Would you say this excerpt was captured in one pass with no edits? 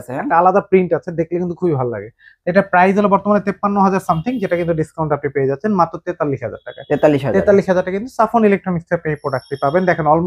yes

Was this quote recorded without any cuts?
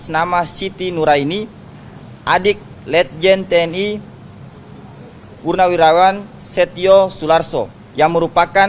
yes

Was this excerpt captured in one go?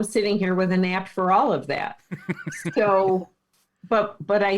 yes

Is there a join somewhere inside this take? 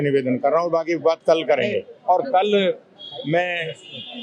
yes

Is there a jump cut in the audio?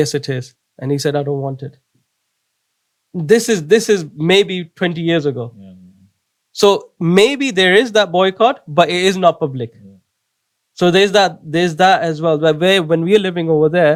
no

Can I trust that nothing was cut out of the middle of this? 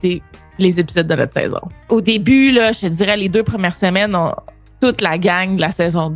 no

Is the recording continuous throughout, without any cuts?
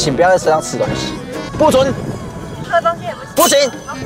yes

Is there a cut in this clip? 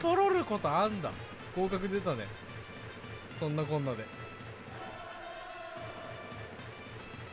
no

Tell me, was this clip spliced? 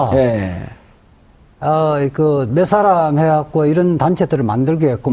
yes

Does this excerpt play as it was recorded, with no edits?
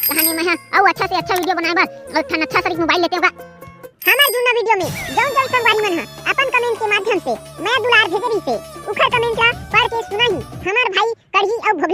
yes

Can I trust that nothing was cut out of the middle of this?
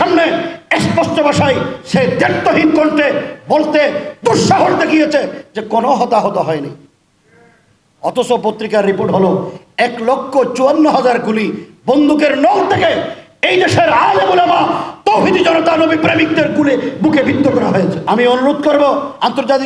no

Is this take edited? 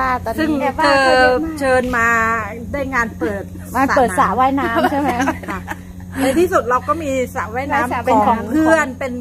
no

